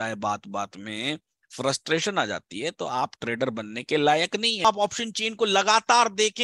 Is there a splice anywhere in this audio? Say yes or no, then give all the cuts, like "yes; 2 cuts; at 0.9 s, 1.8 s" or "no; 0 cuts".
yes; 1 cut; at 4.6 s